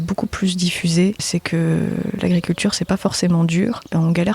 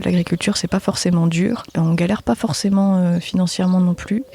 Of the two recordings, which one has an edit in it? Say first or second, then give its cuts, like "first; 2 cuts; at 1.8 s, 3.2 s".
first; 1 cut; at 1.2 s